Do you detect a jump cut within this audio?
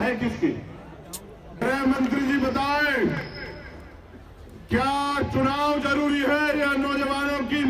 yes; 1 cut; at 1.6 s

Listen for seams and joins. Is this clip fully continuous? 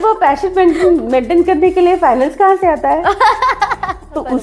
yes; 0 cuts

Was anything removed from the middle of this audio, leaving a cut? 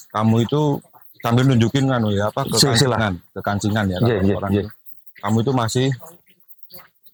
no; 0 cuts

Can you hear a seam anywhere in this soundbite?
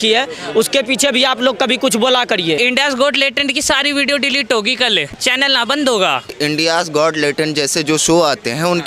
yes; 3 cuts; at 2.6 s, 5.2 s, 6.3 s

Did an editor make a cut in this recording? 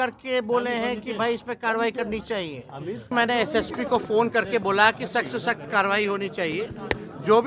yes; 1 cut; at 3.1 s

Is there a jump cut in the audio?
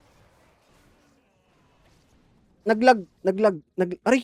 yes; 1 cut; at 2.1 s

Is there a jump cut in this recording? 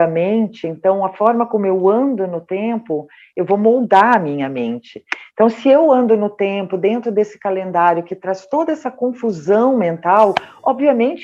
no; 0 cuts

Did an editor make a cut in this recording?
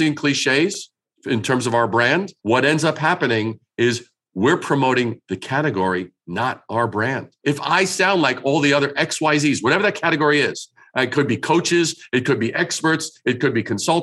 yes; 2 cuts; at 2.3 s, 7.3 s

